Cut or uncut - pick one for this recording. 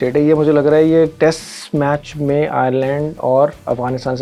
uncut